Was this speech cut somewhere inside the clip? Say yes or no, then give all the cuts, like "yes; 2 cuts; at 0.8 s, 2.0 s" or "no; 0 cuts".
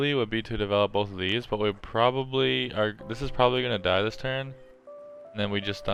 no; 0 cuts